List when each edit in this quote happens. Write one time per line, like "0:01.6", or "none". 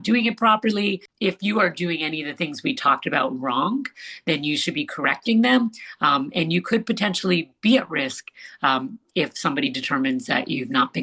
0:01.1